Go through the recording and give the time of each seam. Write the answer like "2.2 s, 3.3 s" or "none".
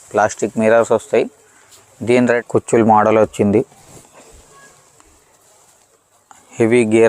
2.4 s